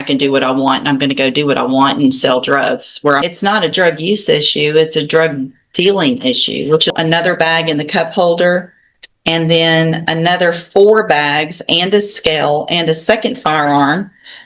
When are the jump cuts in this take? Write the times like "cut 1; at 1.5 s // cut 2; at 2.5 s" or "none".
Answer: cut 1; at 3.2 s // cut 2; at 6.9 s